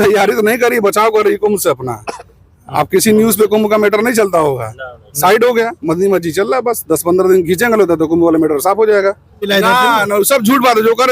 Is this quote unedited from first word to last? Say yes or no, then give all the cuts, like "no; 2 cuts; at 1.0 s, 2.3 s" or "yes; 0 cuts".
no; 1 cut; at 9.5 s